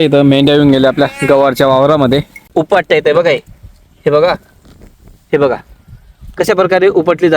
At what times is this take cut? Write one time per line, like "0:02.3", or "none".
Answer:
0:02.4